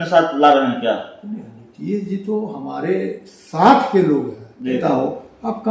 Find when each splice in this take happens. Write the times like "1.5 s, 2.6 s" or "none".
4.8 s